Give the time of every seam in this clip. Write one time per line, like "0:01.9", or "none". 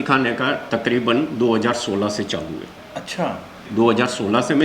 0:03.7